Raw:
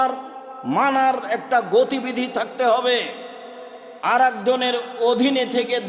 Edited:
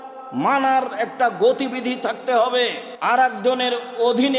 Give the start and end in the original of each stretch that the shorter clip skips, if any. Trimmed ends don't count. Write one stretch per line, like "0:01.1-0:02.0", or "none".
0:03.2-0:03.9